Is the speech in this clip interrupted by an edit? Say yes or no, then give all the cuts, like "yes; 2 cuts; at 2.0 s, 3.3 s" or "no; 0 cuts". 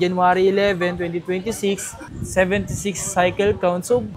no; 0 cuts